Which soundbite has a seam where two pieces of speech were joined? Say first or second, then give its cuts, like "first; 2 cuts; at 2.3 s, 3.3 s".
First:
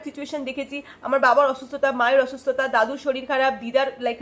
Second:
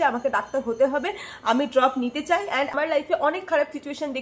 second; 1 cut; at 2.7 s